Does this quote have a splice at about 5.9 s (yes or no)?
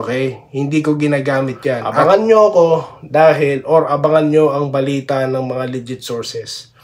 no